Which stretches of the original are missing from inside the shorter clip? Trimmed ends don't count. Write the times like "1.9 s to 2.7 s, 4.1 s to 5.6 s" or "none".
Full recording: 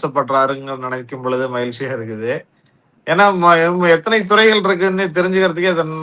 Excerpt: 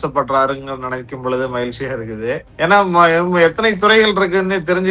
2.5 s to 2.9 s